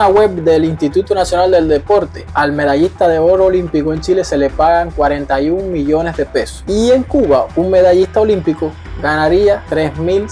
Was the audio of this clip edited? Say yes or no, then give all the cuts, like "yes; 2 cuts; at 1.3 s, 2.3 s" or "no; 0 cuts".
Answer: no; 0 cuts